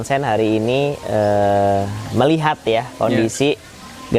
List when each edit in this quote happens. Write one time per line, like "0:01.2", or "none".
none